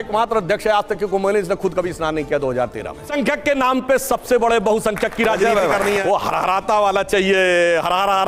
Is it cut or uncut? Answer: cut